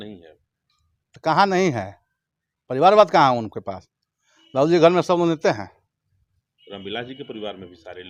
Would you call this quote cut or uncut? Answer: uncut